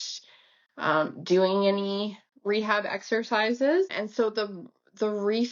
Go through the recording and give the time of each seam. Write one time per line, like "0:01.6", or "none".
0:03.9